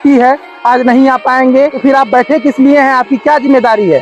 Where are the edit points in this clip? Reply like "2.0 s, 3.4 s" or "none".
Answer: 1.8 s